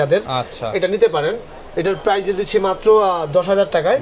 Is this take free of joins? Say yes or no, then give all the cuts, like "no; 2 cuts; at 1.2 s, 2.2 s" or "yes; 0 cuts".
yes; 0 cuts